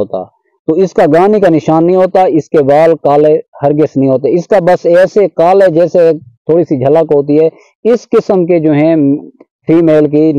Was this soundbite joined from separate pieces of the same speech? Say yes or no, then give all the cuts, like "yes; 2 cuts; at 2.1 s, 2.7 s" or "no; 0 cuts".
no; 0 cuts